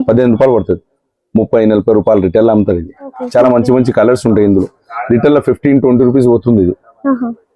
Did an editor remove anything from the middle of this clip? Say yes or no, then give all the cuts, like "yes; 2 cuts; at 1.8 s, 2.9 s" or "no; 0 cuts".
yes; 1 cut; at 3.2 s